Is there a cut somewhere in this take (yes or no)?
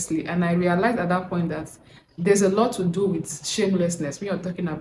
no